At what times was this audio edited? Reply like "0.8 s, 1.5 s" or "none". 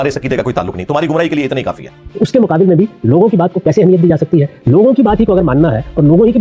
2.0 s